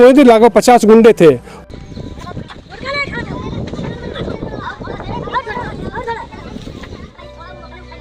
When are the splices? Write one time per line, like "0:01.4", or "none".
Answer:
none